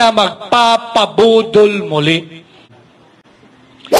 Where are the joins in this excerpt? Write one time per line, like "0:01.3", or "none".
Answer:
0:02.7